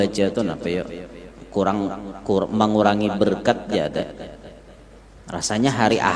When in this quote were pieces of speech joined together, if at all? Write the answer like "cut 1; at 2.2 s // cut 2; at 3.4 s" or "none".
none